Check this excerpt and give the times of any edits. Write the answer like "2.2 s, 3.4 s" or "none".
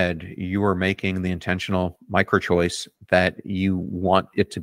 none